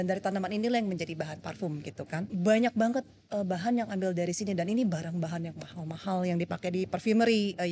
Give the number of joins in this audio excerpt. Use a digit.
1